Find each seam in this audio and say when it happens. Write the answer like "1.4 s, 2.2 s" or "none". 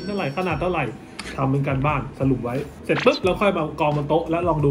2.7 s